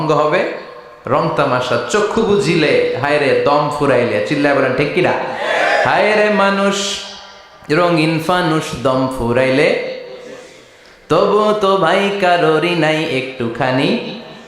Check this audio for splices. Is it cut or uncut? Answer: uncut